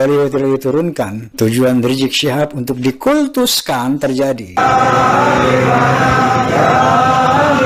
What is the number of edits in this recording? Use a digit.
2